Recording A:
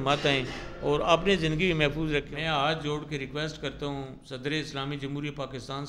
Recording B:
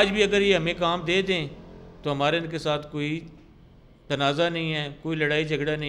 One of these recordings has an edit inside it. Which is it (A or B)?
A